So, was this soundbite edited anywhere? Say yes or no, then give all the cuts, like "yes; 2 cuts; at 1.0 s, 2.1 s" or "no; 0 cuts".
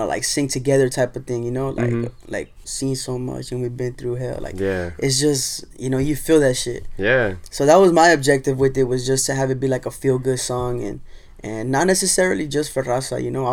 yes; 1 cut; at 2.6 s